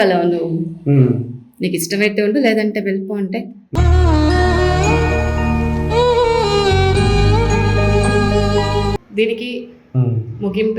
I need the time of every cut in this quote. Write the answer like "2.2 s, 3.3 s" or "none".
9.0 s